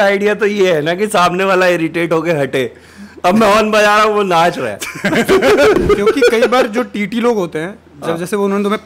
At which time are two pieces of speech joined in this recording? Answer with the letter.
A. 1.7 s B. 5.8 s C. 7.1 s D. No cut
B